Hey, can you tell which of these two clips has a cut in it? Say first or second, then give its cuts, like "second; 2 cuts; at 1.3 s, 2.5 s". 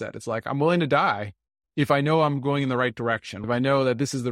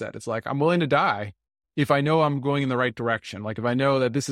first; 1 cut; at 3.3 s